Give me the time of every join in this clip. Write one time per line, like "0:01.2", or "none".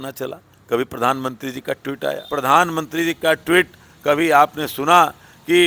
0:02.2